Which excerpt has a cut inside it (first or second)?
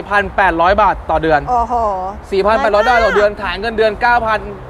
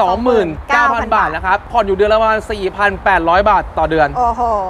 second